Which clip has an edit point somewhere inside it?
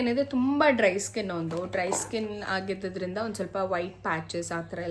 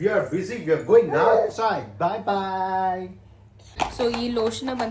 second; 1 cut; at 3.6 s

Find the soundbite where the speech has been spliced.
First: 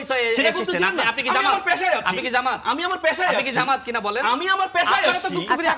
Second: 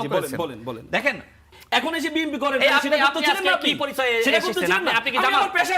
second; 1 cut; at 1.5 s

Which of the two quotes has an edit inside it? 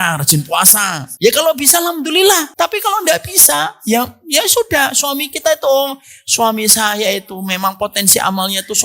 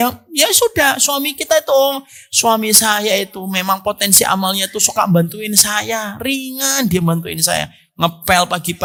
first; 2 cuts; at 1.0 s, 2.5 s

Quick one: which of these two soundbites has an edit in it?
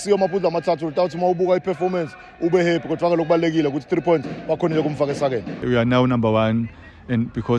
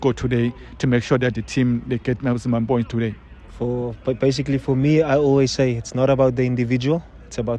first; 1 cut; at 5.6 s

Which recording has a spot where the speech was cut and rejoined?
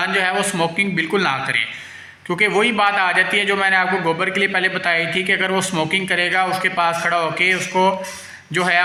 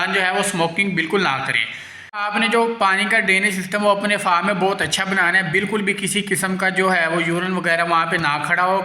second; 1 cut; at 2.1 s

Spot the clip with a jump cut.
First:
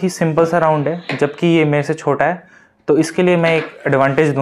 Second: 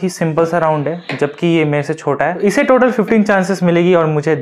second; 1 cut; at 2.4 s

